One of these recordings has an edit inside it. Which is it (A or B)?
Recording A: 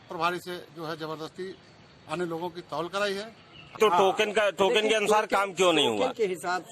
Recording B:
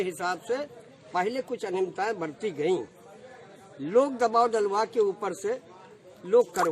A